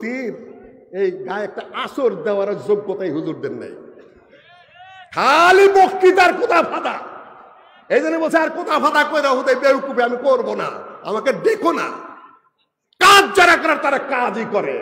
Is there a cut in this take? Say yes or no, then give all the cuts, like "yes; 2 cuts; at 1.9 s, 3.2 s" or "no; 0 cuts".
no; 0 cuts